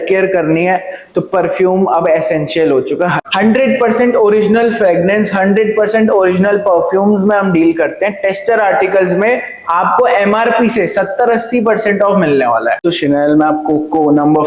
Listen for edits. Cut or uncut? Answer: cut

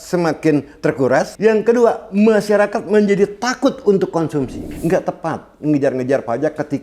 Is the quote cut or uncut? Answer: cut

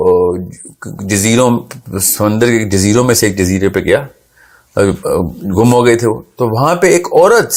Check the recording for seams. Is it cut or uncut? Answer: uncut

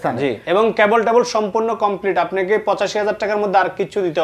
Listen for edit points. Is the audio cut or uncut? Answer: uncut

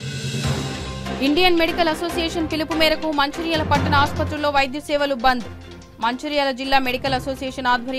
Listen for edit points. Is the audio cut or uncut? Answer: cut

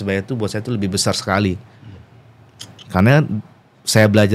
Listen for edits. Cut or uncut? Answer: uncut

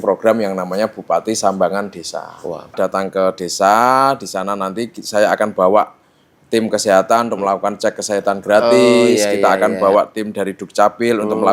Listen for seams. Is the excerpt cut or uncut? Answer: cut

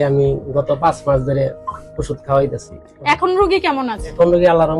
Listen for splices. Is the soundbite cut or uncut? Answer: uncut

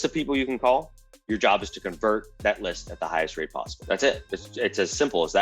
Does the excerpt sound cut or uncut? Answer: cut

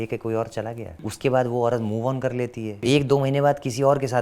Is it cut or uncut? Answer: cut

